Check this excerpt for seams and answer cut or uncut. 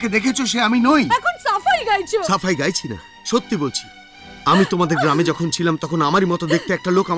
uncut